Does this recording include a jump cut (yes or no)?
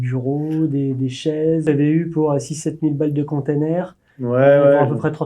yes